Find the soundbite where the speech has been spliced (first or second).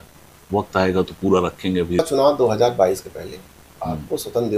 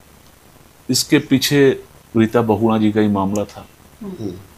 first